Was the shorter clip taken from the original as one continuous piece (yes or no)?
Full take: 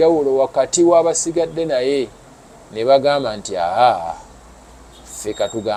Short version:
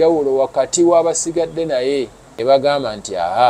no